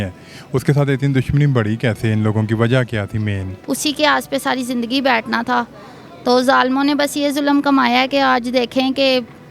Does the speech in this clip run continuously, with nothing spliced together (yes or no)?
no